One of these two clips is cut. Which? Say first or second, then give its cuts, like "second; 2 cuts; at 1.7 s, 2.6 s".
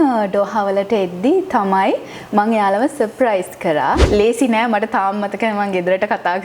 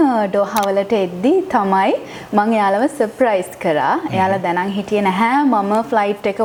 first; 1 cut; at 4.0 s